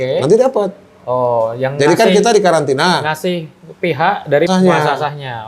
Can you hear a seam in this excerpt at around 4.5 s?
yes; 1 cut; at 4.5 s

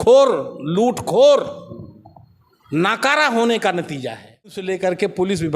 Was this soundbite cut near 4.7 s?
yes; 1 cut; at 4.7 s

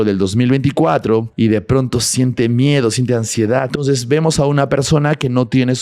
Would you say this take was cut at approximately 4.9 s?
no; 2 cuts; at 1.3 s, 3.7 s

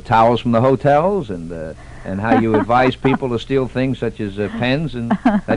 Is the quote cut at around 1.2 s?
yes; 1 cut; at 1.2 s

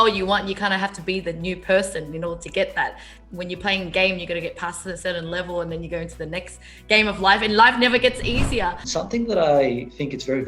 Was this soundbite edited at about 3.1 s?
yes; 2 cuts; at 3.1 s, 8.8 s

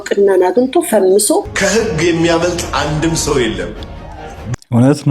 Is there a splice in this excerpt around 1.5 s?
yes; 1 cut; at 1.5 s

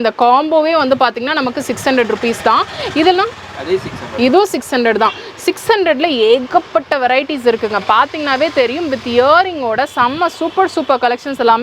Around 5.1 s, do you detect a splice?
no; 0 cuts

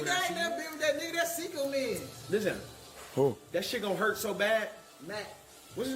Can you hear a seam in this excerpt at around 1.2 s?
no; 1 cut; at 4.2 s

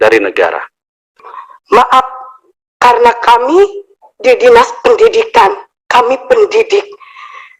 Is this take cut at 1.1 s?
yes; 1 cut; at 1.1 s

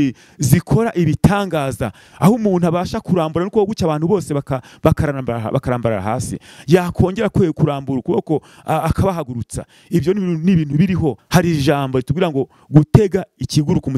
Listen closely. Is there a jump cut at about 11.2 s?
yes; 1 cut; at 11.2 s

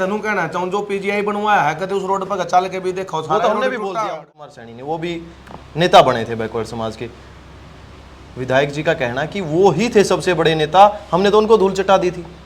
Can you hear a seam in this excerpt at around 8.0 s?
no; 1 cut; at 4.5 s

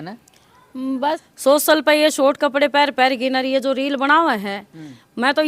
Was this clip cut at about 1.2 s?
yes; 1 cut; at 1.2 s

